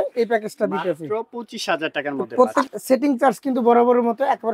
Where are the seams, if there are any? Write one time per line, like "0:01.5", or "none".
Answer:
0:02.7